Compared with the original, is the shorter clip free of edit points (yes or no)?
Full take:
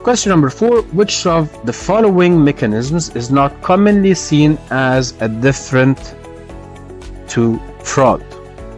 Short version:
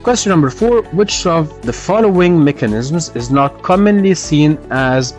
yes